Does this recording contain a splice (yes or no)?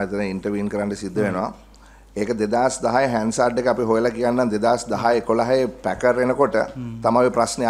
no